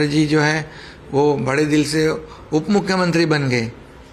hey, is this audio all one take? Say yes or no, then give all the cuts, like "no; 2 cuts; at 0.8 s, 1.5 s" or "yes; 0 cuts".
yes; 0 cuts